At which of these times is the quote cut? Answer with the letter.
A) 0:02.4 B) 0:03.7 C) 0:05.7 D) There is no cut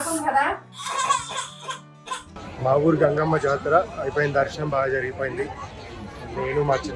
A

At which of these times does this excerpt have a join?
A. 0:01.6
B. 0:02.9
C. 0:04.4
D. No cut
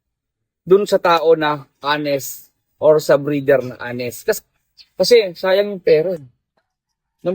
C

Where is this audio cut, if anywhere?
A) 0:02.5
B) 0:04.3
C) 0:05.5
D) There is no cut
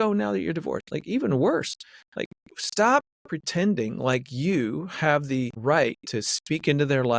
C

